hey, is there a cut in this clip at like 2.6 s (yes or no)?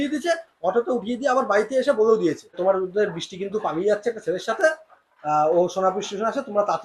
yes